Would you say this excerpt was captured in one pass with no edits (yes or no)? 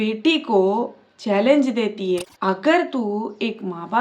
no